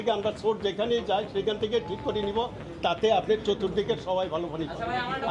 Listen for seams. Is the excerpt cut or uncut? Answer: uncut